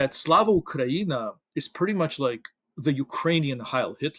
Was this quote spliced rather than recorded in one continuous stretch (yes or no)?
no